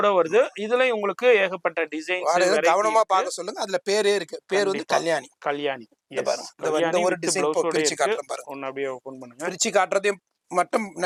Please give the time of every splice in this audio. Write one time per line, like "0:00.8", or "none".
none